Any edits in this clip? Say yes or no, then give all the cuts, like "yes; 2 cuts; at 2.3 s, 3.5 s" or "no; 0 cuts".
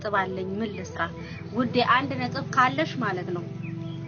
no; 0 cuts